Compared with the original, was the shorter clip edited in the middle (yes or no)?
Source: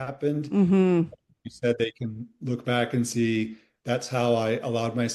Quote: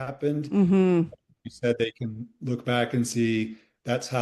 no